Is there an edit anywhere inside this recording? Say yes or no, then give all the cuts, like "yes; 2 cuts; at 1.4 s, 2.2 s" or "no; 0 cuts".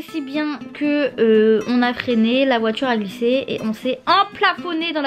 no; 0 cuts